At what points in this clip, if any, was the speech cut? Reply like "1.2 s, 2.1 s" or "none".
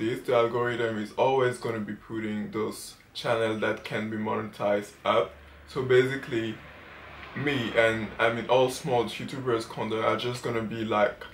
none